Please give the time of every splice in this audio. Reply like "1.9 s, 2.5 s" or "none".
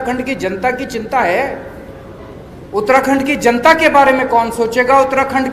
none